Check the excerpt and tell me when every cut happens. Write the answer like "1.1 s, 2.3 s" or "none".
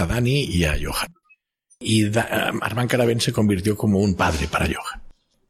none